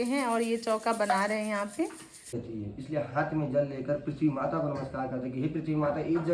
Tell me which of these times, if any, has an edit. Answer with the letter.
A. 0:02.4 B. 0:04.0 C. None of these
A